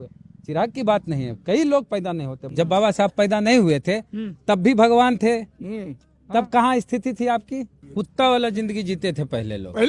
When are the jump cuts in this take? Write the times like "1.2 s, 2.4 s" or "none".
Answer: 2.4 s, 7.8 s

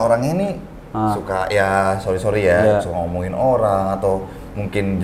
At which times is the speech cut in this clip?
none

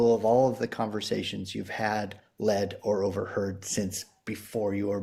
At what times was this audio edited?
none

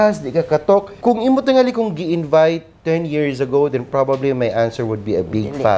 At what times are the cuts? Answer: 0.9 s

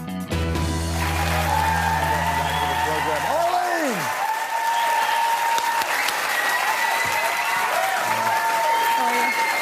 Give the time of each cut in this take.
none

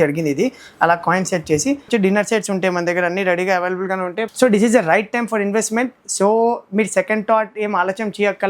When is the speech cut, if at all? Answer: 1.9 s, 4.2 s

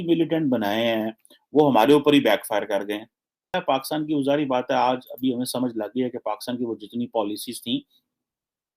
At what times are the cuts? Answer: 3.5 s

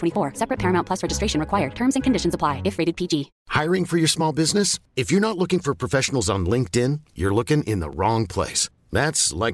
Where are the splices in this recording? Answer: 3.4 s

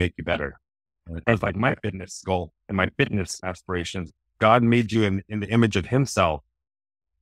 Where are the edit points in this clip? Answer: 1.0 s, 4.1 s

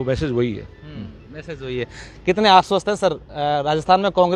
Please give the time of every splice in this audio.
none

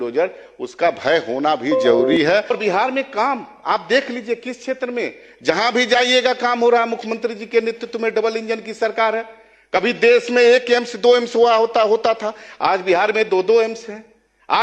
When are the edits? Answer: 2.5 s

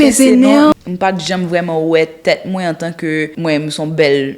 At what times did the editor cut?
0.7 s, 3.3 s

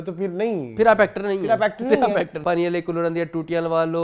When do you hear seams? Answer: 2.4 s

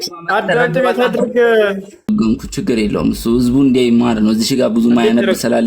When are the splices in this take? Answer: 2.0 s

